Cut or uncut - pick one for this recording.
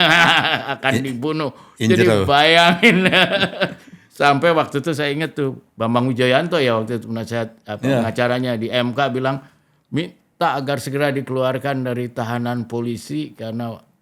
uncut